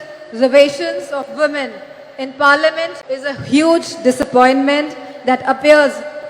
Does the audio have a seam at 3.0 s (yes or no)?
yes